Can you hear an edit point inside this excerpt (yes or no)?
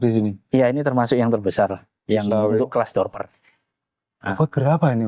no